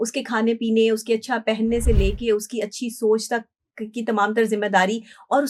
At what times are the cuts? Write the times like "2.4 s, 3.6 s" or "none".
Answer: none